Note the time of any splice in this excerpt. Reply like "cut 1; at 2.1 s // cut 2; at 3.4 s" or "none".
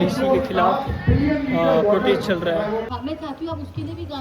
cut 1; at 2.9 s